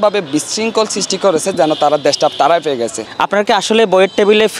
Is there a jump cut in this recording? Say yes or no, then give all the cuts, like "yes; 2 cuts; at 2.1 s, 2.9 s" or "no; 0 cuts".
yes; 1 cut; at 3.0 s